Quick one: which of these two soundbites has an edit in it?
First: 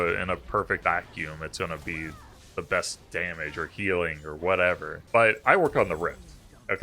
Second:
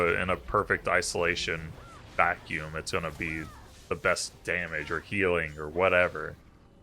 first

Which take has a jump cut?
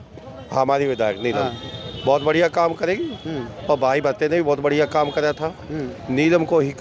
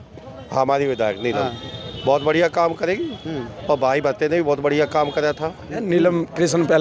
second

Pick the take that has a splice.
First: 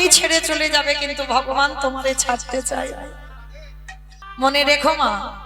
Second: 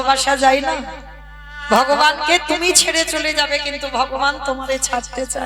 first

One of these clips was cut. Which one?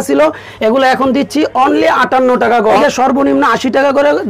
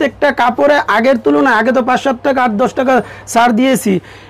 first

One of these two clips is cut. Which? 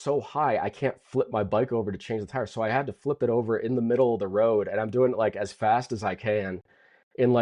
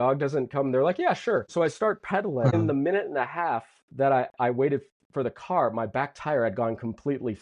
second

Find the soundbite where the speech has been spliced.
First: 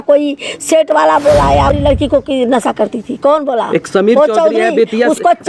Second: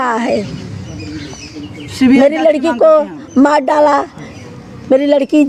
first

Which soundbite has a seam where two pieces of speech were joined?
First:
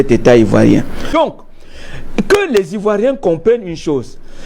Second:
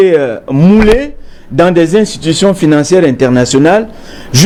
first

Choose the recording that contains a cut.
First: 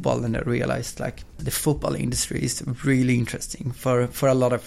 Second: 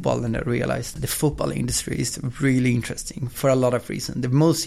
second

